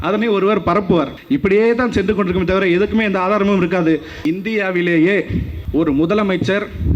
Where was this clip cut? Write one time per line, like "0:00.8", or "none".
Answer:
0:01.2
0:04.1
0:05.5